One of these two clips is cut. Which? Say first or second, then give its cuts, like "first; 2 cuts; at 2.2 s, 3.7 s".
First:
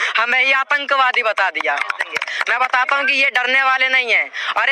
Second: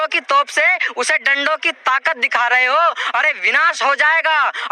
first; 1 cut; at 2.3 s